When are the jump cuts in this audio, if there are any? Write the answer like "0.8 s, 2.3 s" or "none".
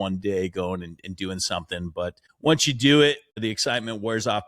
2.3 s, 3.4 s